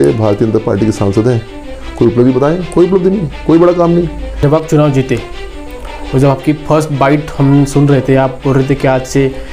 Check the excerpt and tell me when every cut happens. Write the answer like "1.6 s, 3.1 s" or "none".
4.3 s